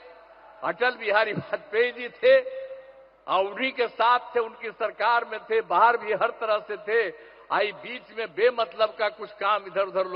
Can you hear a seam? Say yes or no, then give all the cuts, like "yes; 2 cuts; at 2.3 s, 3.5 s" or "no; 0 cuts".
no; 0 cuts